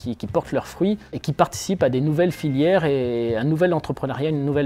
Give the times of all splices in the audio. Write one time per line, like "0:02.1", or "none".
0:01.1